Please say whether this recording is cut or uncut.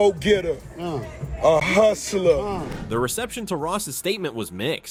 uncut